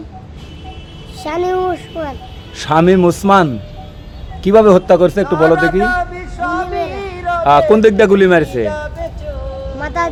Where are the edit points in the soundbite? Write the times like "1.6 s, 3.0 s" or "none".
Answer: none